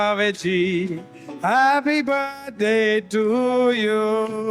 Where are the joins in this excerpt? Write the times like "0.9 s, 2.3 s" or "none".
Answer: none